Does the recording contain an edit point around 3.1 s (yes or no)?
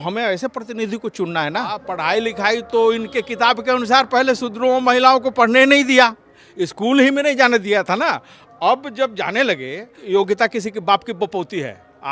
no